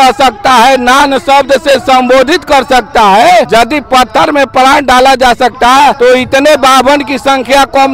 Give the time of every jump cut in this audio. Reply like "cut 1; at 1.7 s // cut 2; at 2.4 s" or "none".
cut 1; at 3.5 s // cut 2; at 6.0 s